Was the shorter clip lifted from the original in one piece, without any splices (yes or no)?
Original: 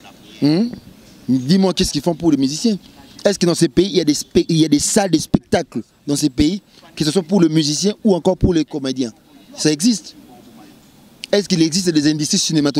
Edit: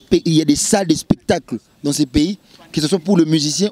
yes